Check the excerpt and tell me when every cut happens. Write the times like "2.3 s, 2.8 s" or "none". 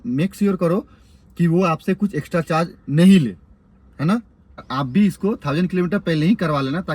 4.6 s